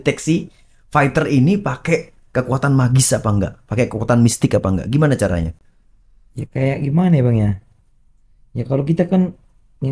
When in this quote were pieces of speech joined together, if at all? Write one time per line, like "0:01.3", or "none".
none